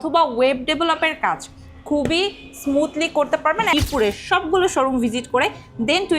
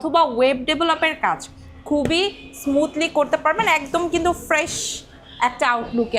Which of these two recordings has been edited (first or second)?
first